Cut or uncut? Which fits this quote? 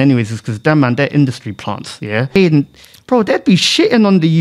cut